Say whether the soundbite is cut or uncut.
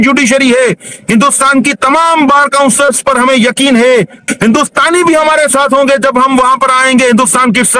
cut